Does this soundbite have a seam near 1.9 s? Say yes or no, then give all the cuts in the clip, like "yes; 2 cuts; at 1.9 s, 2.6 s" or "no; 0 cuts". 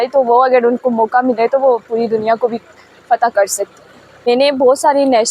no; 1 cut; at 4.3 s